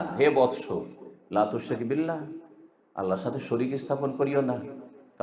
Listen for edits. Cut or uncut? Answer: uncut